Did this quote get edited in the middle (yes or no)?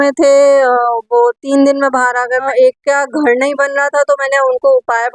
yes